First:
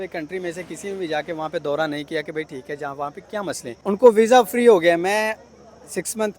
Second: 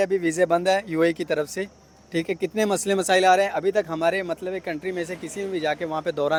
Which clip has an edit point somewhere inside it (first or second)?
first